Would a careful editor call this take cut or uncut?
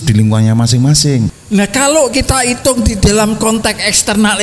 cut